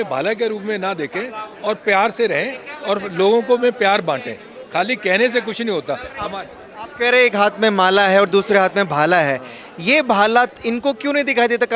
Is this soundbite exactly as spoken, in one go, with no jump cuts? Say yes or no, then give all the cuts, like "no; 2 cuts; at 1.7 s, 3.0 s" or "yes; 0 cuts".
yes; 0 cuts